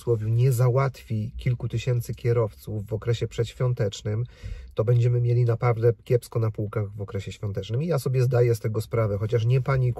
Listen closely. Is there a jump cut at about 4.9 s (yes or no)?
no